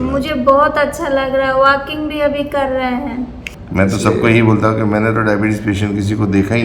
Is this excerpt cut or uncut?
cut